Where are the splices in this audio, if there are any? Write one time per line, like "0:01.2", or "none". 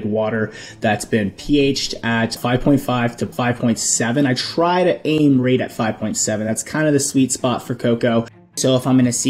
0:02.4
0:03.3
0:08.6